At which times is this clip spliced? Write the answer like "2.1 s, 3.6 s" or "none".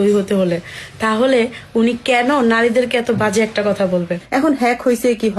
4.2 s